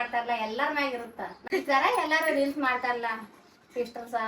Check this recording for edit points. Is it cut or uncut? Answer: cut